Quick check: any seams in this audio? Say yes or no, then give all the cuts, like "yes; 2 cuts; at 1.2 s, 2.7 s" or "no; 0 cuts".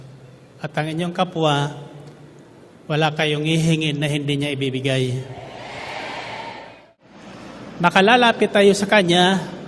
yes; 1 cut; at 7.2 s